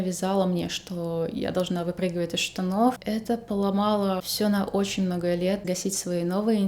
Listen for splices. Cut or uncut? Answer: cut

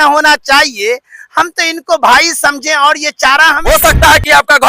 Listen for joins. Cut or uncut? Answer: cut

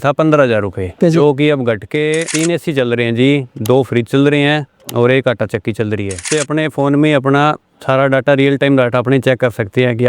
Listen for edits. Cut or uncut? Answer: cut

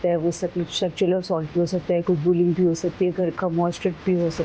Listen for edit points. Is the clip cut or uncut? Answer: uncut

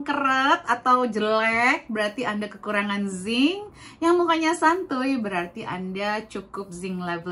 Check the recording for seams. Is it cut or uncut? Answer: uncut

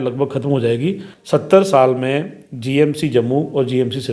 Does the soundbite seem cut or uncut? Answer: cut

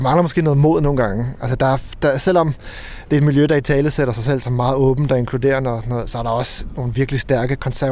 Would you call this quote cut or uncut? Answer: uncut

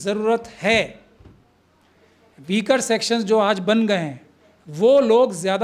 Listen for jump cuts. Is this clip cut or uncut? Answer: uncut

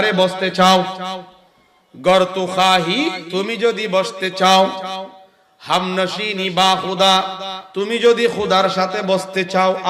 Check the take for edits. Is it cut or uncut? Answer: cut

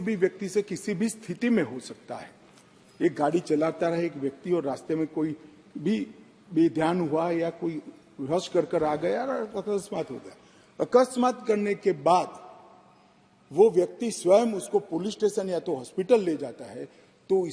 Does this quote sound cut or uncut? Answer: uncut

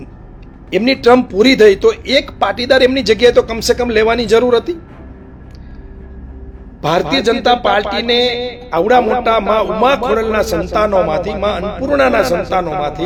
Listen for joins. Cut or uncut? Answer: uncut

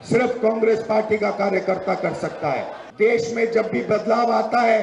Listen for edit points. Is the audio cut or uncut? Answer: cut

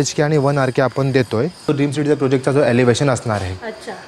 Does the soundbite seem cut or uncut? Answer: cut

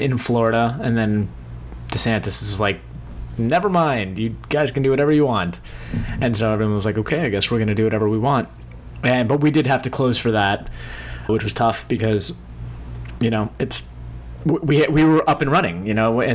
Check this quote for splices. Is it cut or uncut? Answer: uncut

